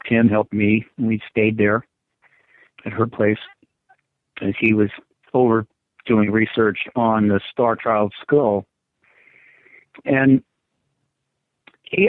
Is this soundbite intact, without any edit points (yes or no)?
no